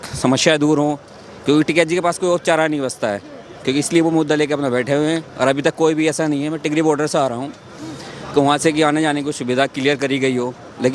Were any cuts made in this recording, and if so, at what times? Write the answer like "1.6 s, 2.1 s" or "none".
none